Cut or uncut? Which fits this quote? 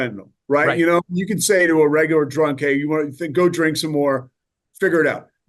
uncut